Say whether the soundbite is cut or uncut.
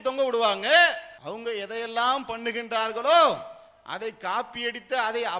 cut